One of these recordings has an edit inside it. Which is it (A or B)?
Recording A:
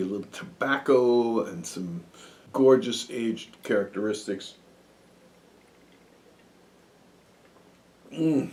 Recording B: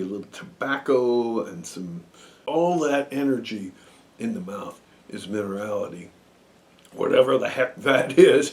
B